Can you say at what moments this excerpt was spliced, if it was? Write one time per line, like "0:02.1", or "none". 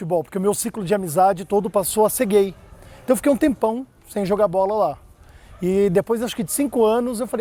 none